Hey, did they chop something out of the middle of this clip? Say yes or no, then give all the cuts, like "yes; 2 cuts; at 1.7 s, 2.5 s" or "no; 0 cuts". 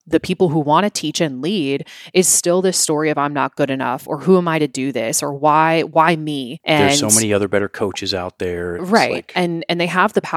no; 0 cuts